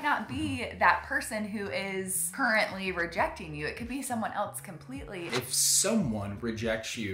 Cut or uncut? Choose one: cut